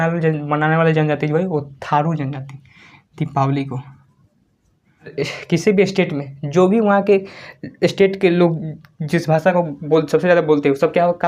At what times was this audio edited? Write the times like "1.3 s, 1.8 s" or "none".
5.1 s